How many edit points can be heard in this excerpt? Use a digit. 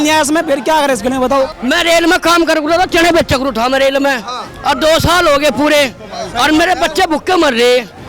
1